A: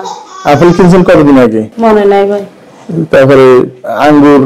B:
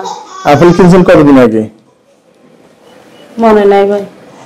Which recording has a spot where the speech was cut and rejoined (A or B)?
A